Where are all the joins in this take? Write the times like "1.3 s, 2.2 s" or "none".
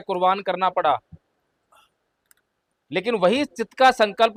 none